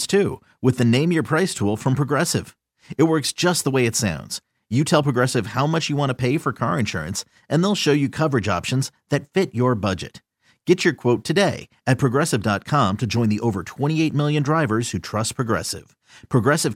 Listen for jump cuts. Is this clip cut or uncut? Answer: uncut